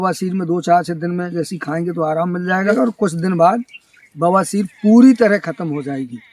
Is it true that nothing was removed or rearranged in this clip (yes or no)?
no